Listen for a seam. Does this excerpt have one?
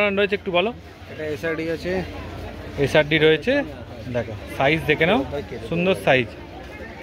no; 0 cuts

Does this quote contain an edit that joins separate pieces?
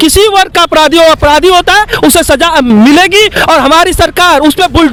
no; 0 cuts

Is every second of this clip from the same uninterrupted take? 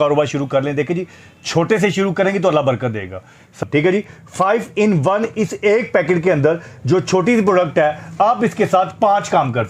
no; 1 cut; at 3.6 s

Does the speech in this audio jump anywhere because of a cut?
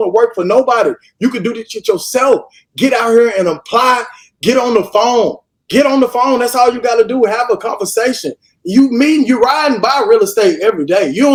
no; 0 cuts

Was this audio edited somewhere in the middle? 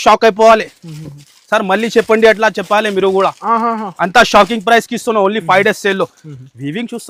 no; 0 cuts

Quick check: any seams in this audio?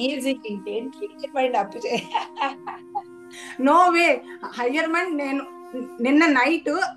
yes; 1 cut; at 1.2 s

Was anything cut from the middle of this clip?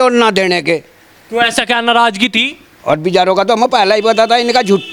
no; 0 cuts

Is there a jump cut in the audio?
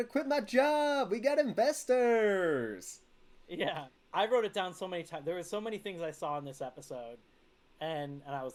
no; 0 cuts

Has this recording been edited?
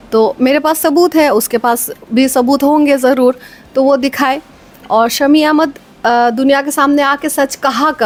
no; 0 cuts

